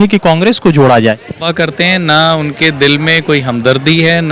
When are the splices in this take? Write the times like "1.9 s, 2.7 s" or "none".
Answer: 1.5 s